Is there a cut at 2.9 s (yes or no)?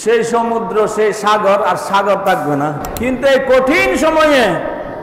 yes